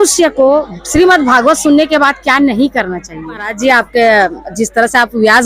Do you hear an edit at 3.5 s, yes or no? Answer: yes